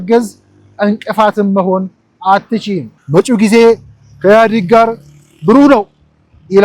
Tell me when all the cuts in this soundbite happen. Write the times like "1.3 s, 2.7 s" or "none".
3.0 s